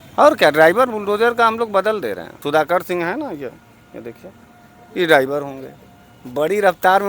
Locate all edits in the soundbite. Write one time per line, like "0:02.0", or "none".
0:02.3